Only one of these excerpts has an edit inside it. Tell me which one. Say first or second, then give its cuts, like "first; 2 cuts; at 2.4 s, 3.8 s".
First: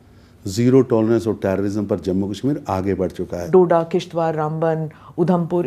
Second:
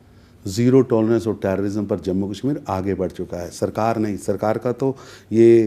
first; 1 cut; at 3.5 s